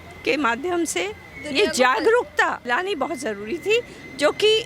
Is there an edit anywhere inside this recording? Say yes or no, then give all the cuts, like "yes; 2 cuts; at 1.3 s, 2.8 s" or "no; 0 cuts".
yes; 1 cut; at 2.6 s